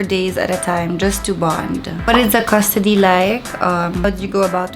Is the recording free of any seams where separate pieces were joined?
no; 1 cut; at 1.9 s

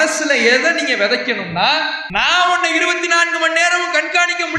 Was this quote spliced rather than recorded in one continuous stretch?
yes; 1 cut; at 2.0 s

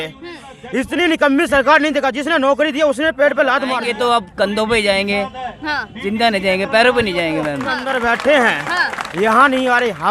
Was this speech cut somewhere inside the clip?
yes; 2 cuts; at 3.8 s, 7.9 s

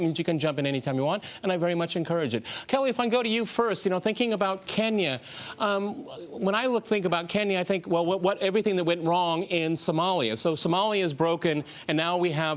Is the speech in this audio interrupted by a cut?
no; 0 cuts

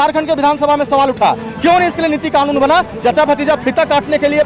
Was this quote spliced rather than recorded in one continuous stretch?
yes; 1 cut; at 2.9 s

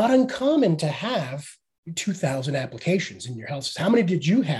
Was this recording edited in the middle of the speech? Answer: no; 0 cuts

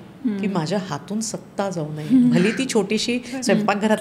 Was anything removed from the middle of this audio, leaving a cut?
no; 0 cuts

